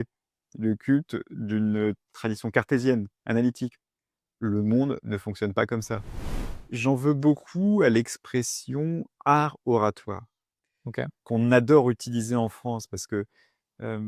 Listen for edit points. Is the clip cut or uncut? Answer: cut